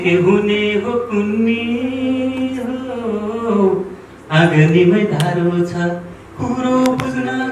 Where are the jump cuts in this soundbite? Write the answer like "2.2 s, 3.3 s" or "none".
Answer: none